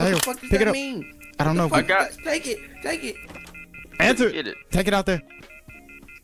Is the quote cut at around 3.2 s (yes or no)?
no